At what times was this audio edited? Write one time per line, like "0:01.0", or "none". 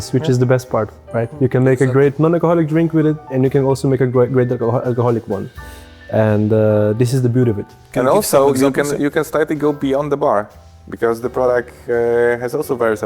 none